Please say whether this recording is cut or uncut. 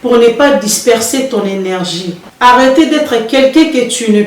cut